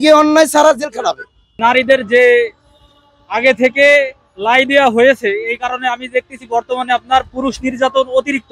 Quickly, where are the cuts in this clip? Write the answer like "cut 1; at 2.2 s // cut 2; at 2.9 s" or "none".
cut 1; at 1.5 s